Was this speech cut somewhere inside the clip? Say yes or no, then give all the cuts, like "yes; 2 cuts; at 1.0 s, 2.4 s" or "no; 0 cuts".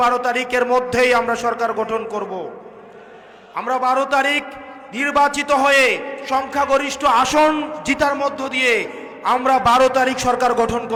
no; 0 cuts